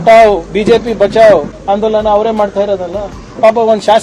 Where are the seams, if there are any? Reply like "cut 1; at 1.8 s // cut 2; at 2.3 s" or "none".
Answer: cut 1; at 1.5 s